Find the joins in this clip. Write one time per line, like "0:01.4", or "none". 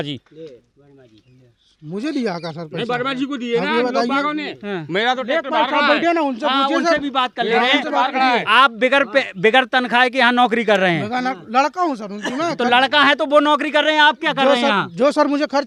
none